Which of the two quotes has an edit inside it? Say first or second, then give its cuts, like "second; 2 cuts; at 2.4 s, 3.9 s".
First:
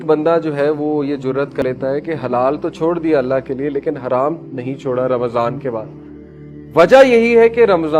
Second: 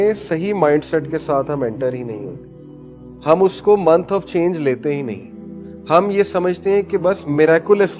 first; 1 cut; at 1.6 s